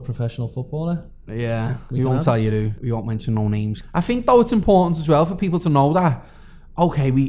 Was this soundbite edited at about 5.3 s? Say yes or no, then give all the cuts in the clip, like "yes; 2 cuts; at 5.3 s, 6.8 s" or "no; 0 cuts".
no; 2 cuts; at 2.7 s, 3.8 s